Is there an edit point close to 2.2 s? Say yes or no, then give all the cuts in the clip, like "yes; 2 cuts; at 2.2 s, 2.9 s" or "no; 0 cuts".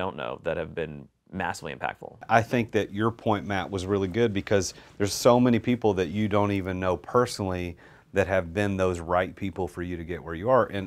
yes; 1 cut; at 2.2 s